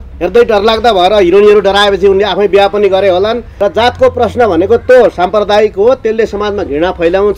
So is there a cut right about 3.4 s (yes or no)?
yes